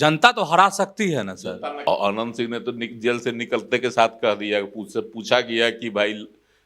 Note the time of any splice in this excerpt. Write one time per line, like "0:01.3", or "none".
0:01.8

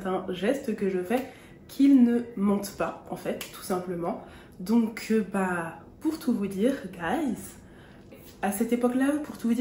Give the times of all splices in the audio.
0:08.2

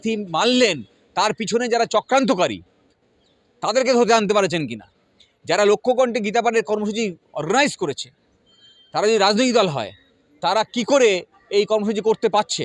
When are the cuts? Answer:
none

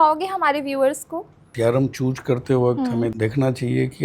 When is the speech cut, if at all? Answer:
0:01.5
0:03.1

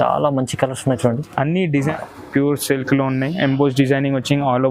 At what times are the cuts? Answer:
0:01.9

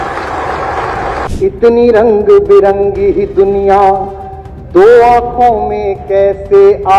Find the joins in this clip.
0:01.2

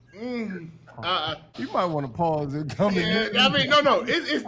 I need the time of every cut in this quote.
0:01.5

